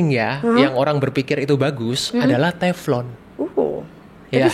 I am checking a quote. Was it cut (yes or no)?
yes